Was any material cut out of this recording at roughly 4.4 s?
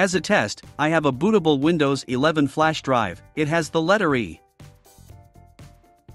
yes; 1 cut; at 4.4 s

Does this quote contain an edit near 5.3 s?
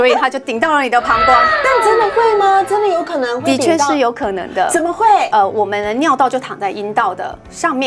yes; 1 cut; at 5.3 s

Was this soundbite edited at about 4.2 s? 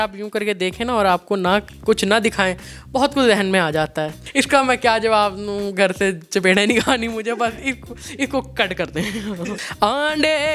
yes; 2 cuts; at 4.2 s, 9.6 s

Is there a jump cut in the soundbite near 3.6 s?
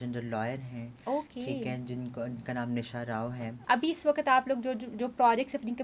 yes; 1 cut; at 3.6 s

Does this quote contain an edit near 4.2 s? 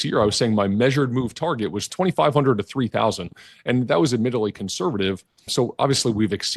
no; 2 cuts; at 1.9 s, 5.5 s

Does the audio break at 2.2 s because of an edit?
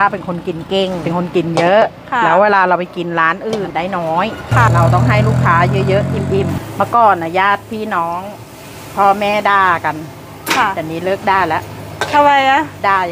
no; 4 cuts; at 1.0 s, 3.7 s, 4.7 s, 6.6 s

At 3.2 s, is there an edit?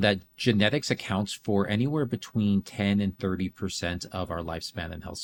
no; 0 cuts

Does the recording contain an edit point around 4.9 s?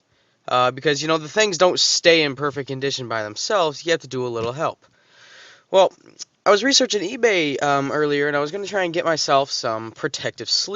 yes; 1 cut; at 4.9 s

